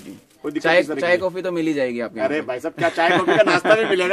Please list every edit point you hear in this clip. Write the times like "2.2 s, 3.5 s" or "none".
none